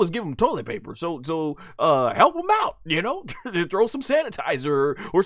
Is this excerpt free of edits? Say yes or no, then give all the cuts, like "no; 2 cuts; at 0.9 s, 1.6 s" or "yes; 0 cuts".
yes; 0 cuts